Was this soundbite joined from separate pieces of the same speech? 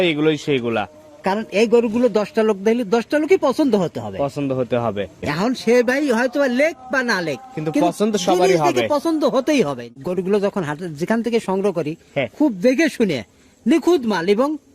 yes; 2 cuts; at 5.2 s, 10.0 s

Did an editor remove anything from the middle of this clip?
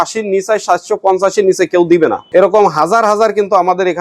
yes; 1 cut; at 2.2 s

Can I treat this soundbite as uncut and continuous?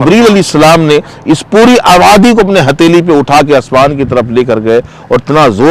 yes; 0 cuts

